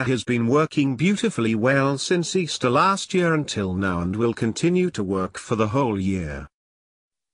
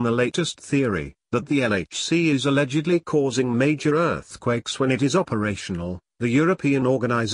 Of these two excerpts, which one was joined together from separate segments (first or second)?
first